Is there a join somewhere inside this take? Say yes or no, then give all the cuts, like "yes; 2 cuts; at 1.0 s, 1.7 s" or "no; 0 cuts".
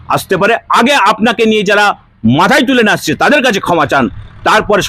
no; 0 cuts